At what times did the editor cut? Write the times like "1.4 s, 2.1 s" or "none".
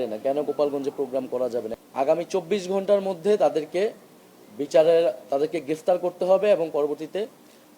1.8 s